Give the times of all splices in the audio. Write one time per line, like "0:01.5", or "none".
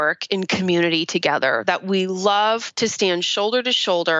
0:02.7

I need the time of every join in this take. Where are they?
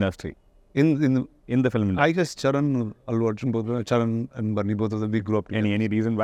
none

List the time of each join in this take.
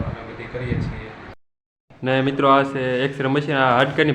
0:01.4

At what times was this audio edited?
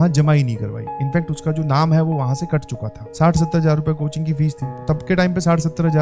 0:03.0
0:04.8

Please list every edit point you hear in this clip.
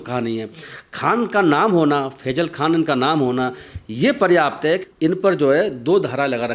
0:04.8

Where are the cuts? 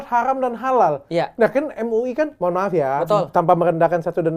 none

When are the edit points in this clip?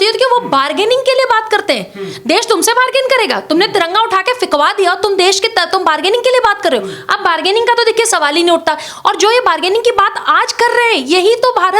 none

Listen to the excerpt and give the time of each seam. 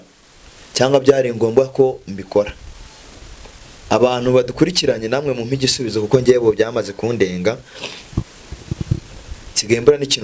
none

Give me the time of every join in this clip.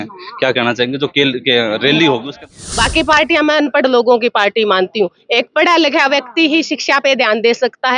0:02.4

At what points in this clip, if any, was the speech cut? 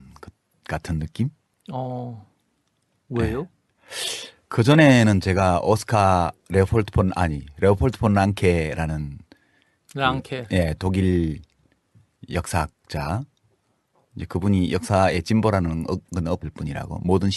0:16.4

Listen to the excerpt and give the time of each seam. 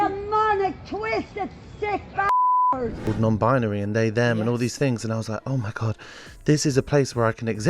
0:03.0

